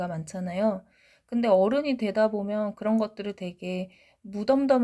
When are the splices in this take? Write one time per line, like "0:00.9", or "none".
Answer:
none